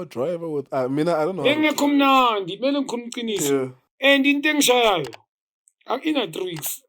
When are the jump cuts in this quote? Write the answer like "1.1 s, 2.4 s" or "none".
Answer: 3.8 s